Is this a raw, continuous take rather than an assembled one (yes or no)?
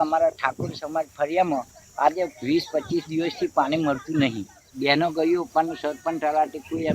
no